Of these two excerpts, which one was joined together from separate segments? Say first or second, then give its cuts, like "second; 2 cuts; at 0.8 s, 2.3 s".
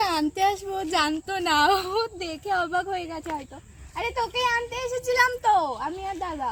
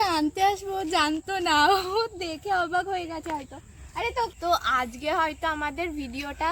second; 1 cut; at 4.3 s